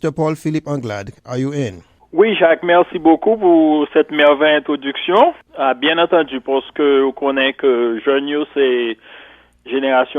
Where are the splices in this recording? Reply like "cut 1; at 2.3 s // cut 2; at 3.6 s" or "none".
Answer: cut 1; at 1.2 s // cut 2; at 5.5 s